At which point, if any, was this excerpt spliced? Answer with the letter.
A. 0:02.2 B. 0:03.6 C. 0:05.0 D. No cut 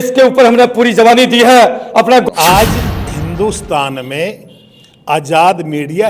A